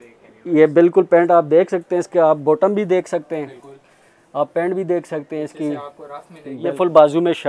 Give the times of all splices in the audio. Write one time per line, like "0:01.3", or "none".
0:06.6